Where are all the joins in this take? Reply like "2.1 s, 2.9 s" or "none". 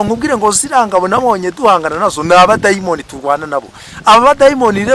none